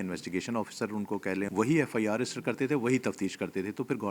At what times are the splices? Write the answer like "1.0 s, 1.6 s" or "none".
1.5 s